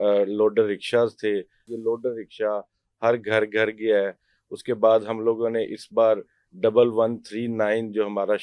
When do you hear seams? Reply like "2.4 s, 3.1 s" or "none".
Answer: 1.7 s